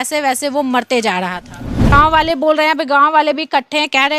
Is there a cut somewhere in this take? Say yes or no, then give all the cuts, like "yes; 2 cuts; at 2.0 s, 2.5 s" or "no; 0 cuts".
yes; 1 cut; at 1.9 s